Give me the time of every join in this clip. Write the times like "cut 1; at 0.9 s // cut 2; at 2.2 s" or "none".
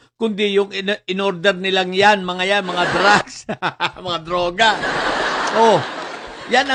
none